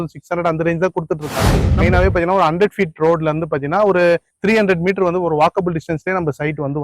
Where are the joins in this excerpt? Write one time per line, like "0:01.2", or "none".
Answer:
0:01.6